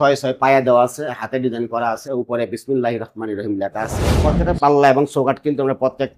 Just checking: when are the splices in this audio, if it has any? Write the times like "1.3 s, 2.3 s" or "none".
4.1 s